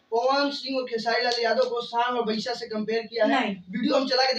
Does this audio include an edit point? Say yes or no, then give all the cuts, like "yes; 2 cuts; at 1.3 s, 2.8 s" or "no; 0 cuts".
no; 0 cuts